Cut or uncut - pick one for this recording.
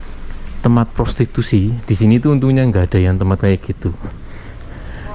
uncut